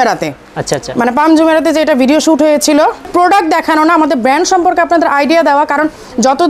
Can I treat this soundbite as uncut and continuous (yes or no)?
no